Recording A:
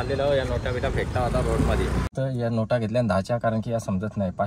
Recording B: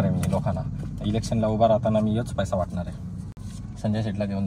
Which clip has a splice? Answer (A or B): A